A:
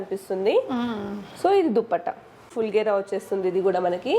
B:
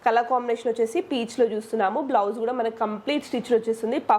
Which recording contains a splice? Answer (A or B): A